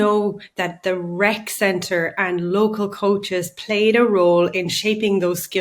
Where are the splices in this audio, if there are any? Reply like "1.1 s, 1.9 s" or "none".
none